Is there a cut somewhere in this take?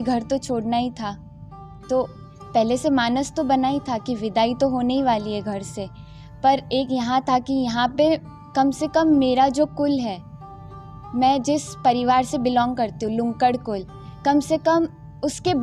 no; 0 cuts

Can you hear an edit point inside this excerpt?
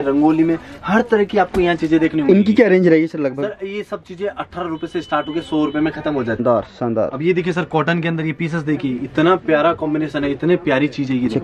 yes; 1 cut; at 6.4 s

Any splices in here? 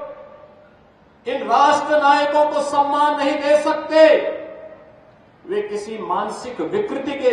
no; 0 cuts

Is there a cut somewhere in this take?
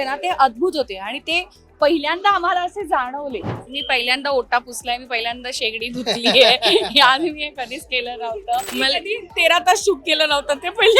yes; 2 cuts; at 3.6 s, 8.7 s

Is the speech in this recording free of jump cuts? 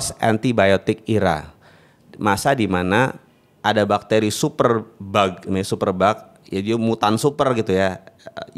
yes; 0 cuts

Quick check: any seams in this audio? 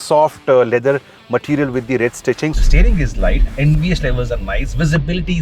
yes; 1 cut; at 2.6 s

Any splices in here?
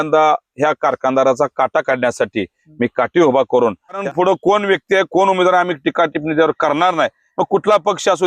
yes; 1 cut; at 4.0 s

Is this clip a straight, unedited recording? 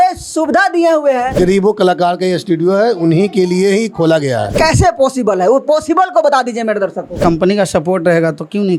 no; 3 cuts; at 1.4 s, 4.5 s, 7.2 s

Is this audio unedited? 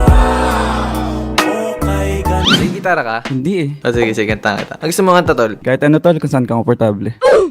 no; 1 cut; at 2.6 s

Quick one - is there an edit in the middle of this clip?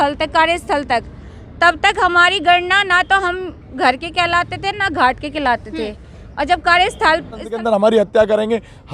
yes; 1 cut; at 7.5 s

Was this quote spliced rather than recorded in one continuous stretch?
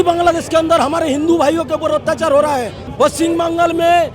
yes; 1 cut; at 2.8 s

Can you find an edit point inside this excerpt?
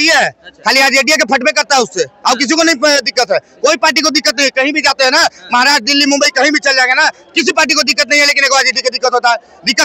no; 0 cuts

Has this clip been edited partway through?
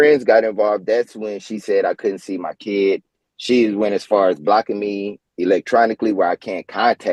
no; 0 cuts

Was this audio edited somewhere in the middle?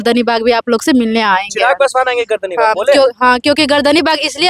no; 0 cuts

